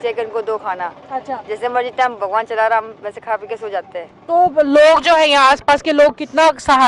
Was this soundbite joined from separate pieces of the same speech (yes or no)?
no